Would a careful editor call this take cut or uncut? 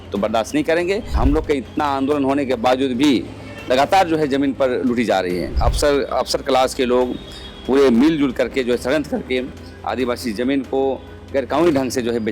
cut